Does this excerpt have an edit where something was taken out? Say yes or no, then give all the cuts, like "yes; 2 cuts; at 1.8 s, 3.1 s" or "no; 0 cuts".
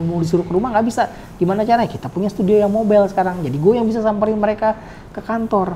no; 0 cuts